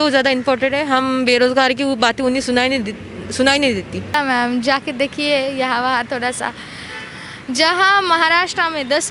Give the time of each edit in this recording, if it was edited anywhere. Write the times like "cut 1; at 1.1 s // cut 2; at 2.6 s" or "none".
cut 1; at 4.1 s